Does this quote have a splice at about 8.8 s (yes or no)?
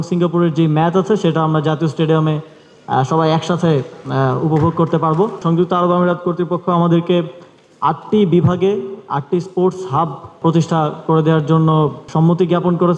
no